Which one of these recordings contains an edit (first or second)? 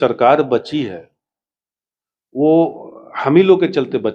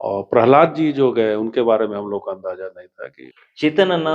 second